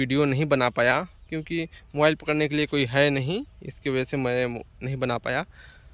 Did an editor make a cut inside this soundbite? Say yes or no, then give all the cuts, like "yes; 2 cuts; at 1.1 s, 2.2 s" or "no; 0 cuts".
no; 0 cuts